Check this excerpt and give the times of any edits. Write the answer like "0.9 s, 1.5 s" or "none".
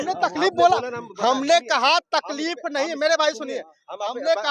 none